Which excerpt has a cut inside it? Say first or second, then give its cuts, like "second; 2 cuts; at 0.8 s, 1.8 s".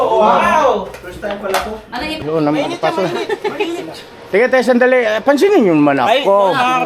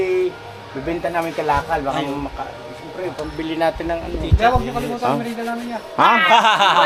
first; 1 cut; at 2.2 s